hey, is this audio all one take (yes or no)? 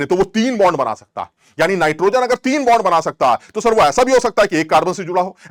yes